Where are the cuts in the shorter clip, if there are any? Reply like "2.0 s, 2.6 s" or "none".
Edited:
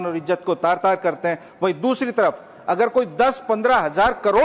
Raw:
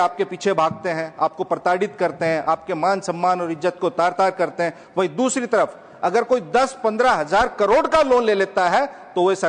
none